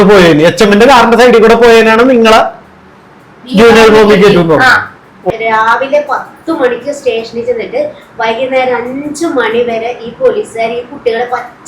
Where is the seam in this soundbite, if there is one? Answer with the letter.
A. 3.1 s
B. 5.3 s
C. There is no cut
B